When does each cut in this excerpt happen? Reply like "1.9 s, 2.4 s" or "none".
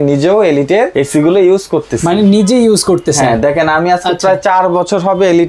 0.9 s